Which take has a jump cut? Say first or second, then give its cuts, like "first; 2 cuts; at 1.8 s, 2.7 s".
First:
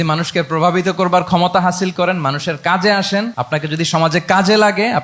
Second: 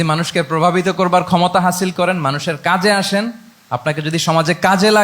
first; 1 cut; at 3.4 s